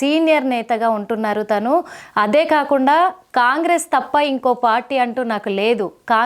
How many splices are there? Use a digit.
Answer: 0